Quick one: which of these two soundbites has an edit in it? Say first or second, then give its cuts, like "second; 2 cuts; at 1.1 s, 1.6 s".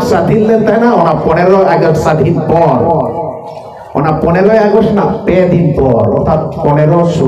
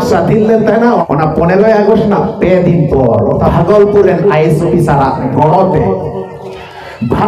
second; 3 cuts; at 1.0 s, 3.5 s, 5.3 s